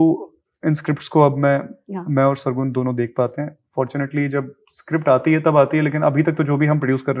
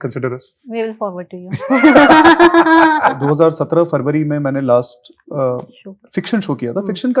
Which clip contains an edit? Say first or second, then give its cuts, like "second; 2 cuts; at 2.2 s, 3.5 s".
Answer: second; 1 cut; at 3.2 s